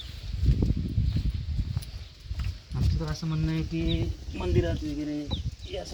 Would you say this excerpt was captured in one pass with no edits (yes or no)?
yes